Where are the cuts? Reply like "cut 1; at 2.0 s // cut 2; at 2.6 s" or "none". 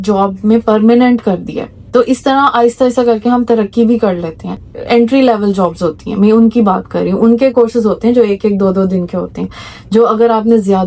cut 1; at 4.7 s